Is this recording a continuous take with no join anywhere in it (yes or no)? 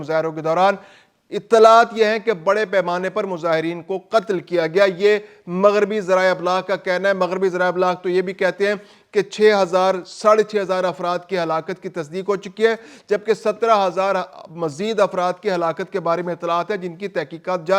yes